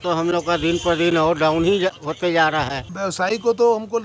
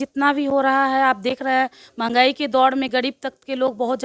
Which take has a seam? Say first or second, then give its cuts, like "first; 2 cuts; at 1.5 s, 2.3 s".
first; 1 cut; at 2.9 s